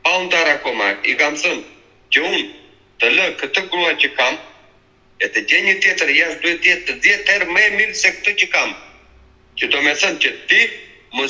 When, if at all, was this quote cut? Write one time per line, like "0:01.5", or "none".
none